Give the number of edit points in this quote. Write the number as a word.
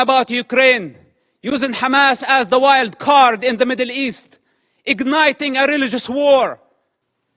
zero